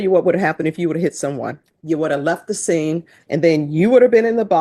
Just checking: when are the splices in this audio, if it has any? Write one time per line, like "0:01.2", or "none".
0:01.7
0:03.2